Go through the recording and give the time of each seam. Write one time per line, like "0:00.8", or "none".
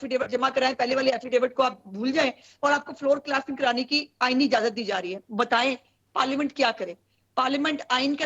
0:05.2